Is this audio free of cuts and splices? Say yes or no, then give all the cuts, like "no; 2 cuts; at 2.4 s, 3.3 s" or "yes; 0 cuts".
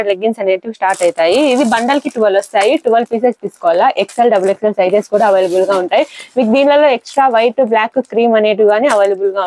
yes; 0 cuts